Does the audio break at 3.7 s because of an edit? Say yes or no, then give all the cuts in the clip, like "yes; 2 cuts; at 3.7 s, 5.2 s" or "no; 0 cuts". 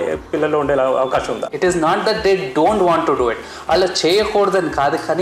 no; 1 cut; at 1.4 s